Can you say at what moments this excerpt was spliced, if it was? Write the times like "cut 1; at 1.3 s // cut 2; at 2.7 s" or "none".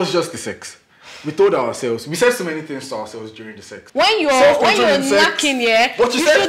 cut 1; at 3.8 s